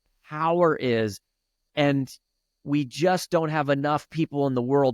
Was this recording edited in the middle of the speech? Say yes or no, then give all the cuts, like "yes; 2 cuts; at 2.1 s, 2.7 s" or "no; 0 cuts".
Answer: no; 0 cuts